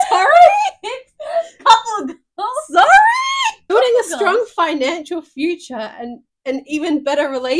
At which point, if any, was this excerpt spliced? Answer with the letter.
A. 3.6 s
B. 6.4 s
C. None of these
A